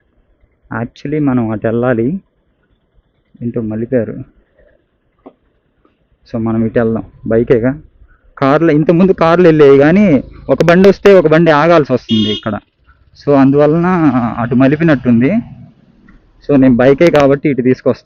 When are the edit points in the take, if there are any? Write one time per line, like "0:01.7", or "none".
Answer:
none